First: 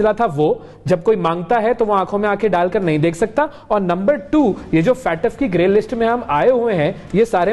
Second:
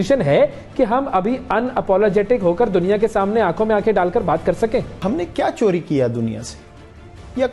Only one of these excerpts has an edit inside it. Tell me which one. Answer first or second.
second